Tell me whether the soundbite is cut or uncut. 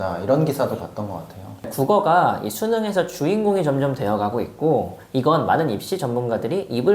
cut